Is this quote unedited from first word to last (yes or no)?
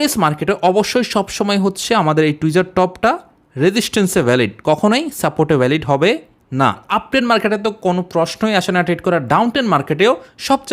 no